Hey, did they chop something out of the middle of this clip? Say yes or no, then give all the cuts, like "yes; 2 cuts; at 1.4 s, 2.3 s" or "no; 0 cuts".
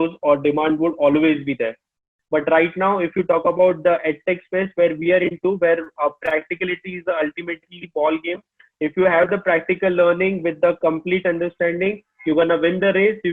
yes; 1 cut; at 2.1 s